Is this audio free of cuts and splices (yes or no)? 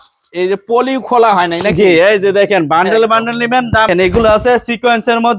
no